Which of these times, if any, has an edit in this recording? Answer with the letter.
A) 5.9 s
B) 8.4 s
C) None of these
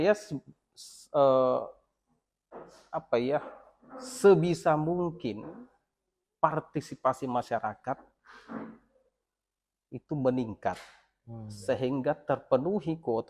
C